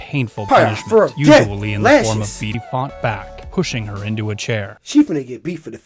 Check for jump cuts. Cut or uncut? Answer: cut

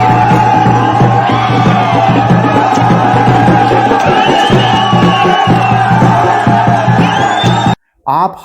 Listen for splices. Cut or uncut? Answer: uncut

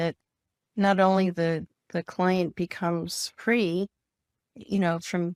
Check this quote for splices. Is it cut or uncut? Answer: uncut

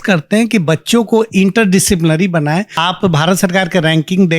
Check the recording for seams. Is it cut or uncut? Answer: cut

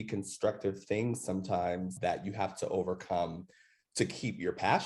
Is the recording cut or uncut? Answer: uncut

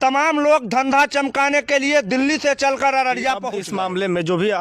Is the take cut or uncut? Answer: cut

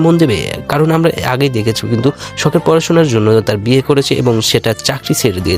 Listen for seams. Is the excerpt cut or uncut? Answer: uncut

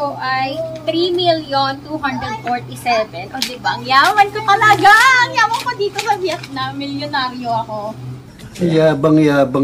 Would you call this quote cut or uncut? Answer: uncut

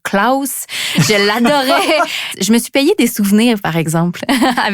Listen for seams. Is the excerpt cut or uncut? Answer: cut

